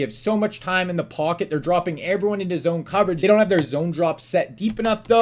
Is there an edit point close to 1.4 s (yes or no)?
no